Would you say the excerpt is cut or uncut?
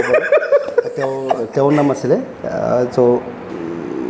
uncut